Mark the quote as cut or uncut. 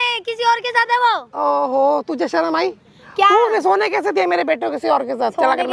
uncut